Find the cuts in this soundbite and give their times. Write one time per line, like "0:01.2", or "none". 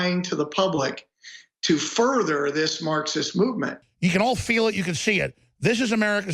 0:03.8